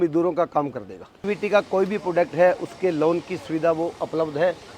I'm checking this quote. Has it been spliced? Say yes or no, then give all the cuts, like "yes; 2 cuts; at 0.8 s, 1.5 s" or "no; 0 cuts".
yes; 1 cut; at 1.2 s